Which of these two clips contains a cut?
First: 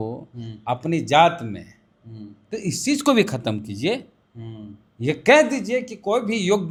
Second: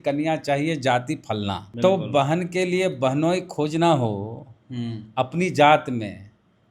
second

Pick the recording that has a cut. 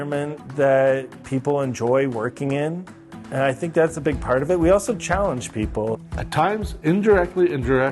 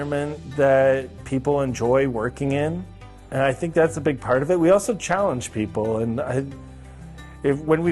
first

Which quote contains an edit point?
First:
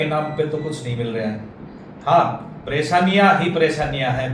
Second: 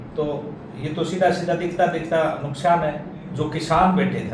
second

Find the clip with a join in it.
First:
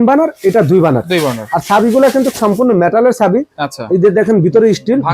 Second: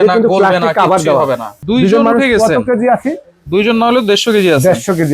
second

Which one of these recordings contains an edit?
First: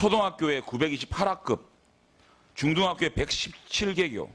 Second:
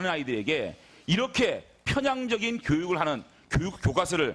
second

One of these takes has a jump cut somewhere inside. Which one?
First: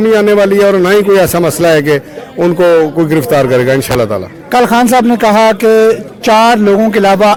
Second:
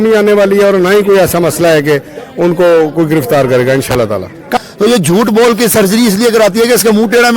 second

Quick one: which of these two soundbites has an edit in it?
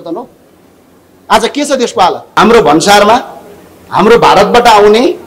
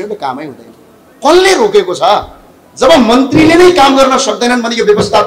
first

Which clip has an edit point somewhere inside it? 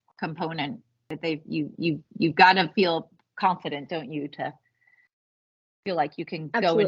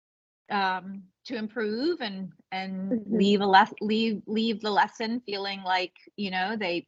first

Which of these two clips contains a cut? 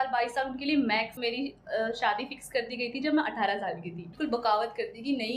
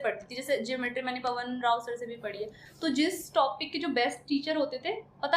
first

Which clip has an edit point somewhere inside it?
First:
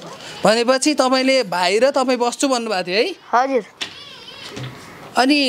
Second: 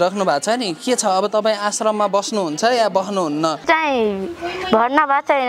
second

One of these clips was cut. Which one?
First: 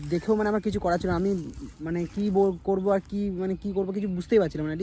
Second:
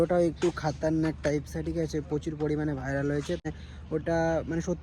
second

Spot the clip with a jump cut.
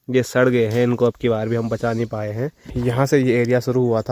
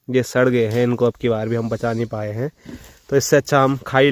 first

